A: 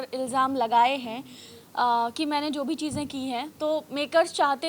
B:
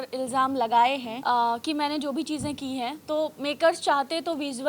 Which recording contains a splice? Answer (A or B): B